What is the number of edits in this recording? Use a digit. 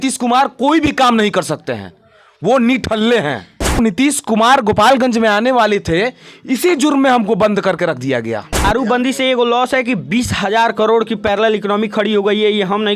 2